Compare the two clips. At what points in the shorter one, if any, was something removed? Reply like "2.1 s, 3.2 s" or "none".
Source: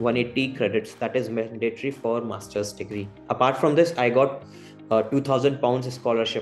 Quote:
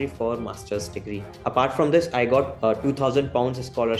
2.5 s